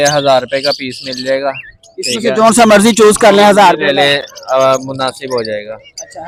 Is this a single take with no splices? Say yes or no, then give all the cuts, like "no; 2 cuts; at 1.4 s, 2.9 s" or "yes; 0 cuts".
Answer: yes; 0 cuts